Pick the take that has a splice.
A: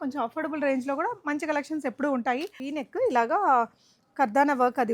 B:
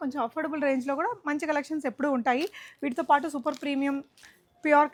A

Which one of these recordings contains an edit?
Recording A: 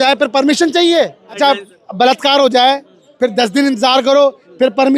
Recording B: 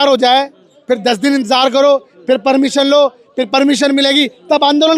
A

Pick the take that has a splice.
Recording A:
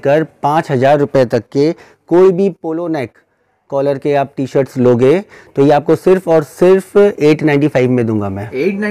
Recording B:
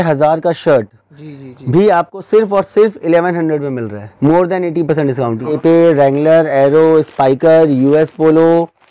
B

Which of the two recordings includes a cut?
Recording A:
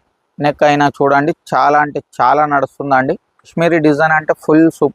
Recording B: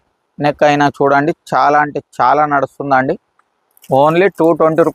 A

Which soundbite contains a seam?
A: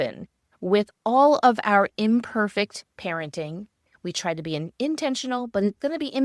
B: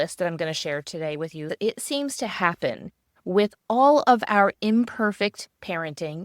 B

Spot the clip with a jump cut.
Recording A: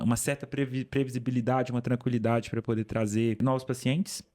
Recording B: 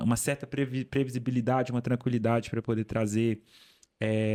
A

